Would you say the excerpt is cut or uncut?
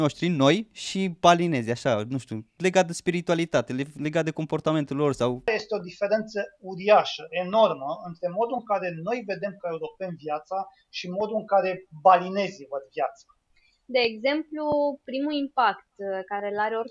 cut